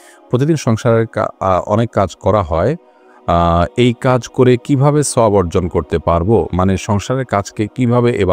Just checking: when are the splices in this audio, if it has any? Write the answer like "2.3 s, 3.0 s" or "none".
none